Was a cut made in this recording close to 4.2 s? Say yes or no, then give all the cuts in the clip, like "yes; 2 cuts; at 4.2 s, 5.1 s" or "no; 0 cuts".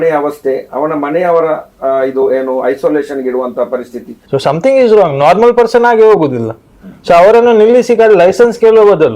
yes; 1 cut; at 4.2 s